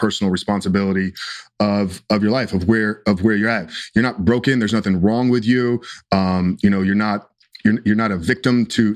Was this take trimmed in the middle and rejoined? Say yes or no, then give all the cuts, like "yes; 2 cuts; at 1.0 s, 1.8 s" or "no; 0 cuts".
no; 0 cuts